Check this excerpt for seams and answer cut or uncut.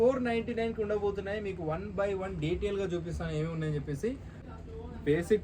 cut